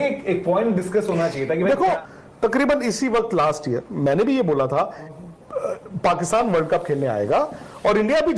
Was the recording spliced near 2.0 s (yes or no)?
yes